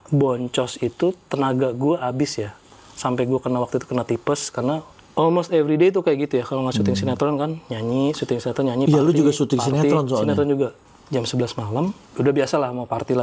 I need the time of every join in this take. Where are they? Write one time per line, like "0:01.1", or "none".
0:05.0
0:10.8
0:12.0